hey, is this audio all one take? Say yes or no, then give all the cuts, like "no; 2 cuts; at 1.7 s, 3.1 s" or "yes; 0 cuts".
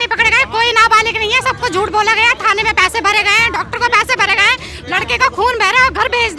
yes; 0 cuts